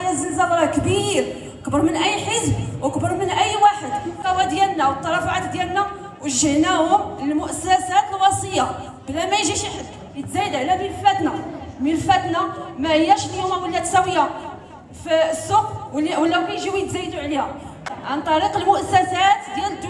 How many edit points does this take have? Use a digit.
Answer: 2